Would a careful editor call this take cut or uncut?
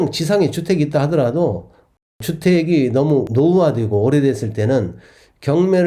uncut